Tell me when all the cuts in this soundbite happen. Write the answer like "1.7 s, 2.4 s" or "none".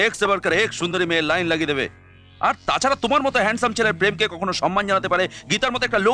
none